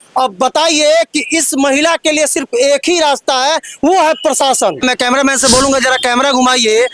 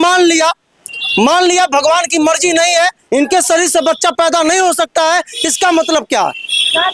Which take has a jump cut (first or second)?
first